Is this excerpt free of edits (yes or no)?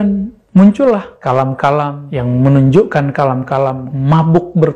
no